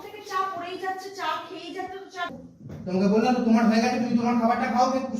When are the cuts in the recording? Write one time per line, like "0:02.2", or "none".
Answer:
0:02.3